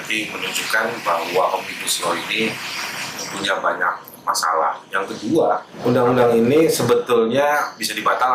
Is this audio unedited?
no; 1 cut; at 5.7 s

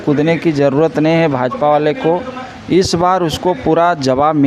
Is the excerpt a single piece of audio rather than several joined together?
yes; 0 cuts

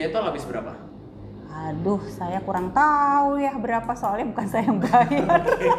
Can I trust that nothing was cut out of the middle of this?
yes; 0 cuts

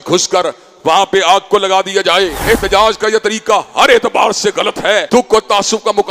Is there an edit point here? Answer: yes; 2 cuts; at 2.4 s, 5.1 s

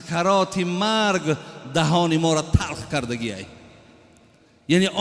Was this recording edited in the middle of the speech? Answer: no; 0 cuts

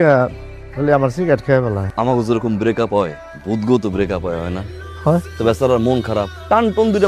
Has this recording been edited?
no; 0 cuts

